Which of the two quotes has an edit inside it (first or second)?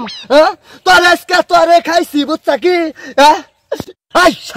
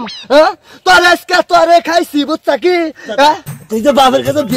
second